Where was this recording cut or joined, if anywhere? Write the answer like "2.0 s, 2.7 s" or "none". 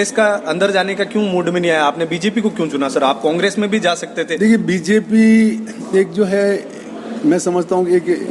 none